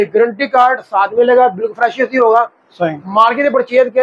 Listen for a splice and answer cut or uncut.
uncut